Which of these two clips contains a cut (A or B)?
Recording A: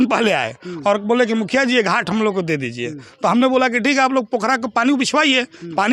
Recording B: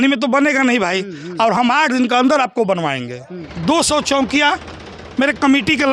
B